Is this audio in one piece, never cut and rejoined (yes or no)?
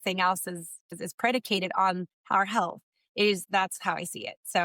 no